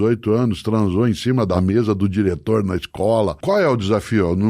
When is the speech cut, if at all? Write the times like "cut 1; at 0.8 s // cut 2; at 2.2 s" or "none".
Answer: cut 1; at 1.6 s // cut 2; at 3.4 s